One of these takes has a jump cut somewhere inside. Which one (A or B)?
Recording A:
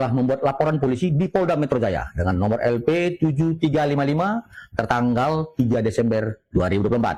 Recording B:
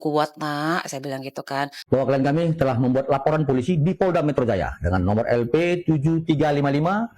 B